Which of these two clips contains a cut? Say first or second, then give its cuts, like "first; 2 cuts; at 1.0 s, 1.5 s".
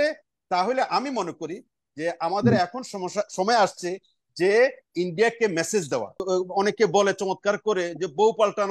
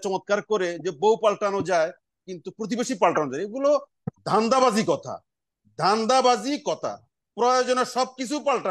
first; 1 cut; at 6.1 s